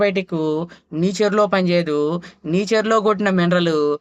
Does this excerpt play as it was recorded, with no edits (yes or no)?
yes